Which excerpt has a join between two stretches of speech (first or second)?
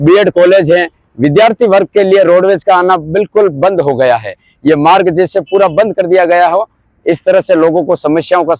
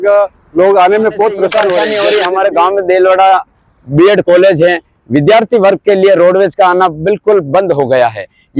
second